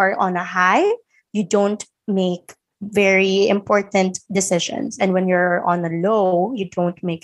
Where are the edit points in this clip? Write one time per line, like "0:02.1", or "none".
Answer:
none